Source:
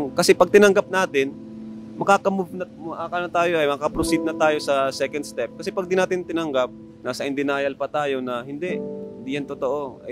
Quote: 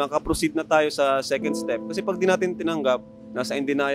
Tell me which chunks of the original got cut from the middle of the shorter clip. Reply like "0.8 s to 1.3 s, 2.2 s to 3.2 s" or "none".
none